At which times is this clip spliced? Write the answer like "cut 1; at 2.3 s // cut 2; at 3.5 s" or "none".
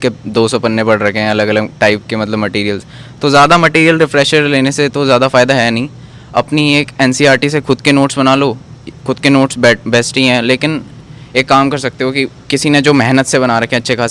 none